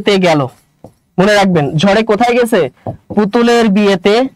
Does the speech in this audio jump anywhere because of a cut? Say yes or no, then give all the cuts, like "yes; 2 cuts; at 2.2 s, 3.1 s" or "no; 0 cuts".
no; 0 cuts